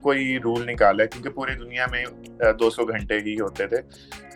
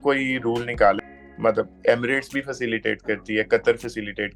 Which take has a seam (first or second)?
second